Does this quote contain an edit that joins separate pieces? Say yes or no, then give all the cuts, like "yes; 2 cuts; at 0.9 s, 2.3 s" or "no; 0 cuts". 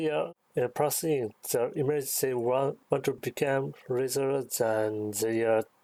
no; 0 cuts